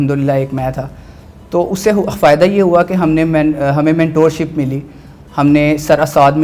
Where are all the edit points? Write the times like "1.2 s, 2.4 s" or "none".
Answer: none